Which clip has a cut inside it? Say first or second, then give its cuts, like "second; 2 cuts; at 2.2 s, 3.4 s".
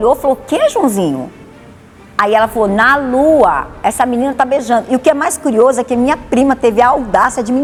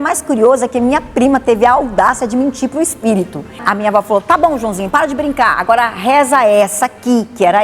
second; 1 cut; at 3.6 s